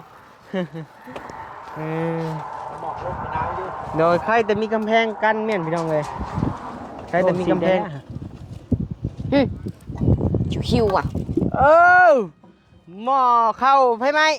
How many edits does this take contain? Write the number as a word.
one